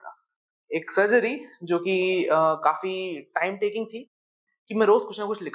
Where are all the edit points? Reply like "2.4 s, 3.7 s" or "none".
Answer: 4.3 s